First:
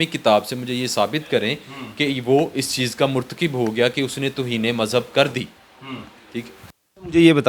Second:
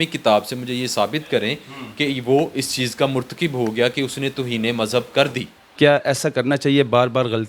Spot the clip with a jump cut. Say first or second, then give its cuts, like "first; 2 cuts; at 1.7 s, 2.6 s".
second; 1 cut; at 5.6 s